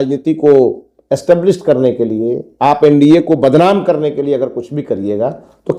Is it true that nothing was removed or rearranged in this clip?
yes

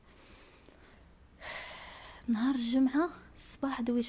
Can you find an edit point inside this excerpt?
yes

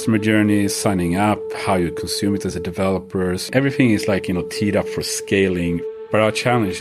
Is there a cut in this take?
yes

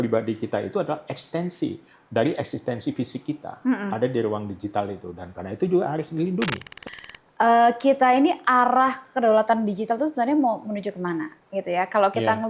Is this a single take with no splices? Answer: no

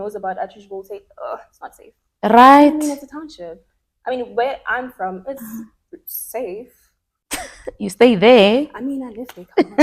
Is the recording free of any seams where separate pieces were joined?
yes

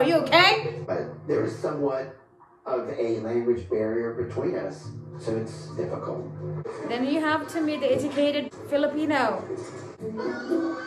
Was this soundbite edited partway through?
yes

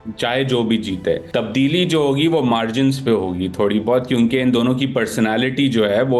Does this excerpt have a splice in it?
no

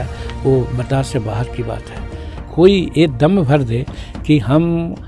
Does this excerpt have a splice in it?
yes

